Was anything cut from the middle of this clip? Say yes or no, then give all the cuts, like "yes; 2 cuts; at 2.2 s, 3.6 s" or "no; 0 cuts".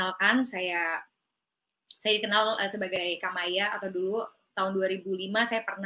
no; 0 cuts